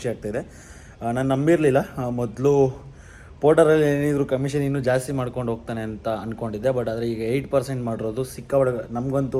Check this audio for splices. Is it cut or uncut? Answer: uncut